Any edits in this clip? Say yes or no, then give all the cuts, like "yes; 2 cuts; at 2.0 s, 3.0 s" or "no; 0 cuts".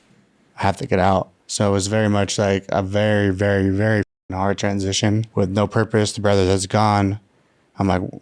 yes; 2 cuts; at 1.4 s, 5.3 s